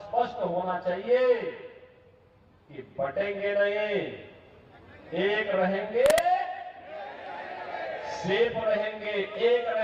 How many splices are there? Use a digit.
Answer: 0